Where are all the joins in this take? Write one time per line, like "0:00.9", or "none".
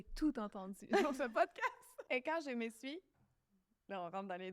0:01.9